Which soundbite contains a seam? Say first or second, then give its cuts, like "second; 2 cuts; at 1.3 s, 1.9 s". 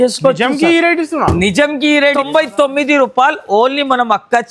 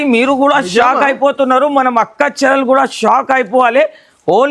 first; 1 cut; at 2.1 s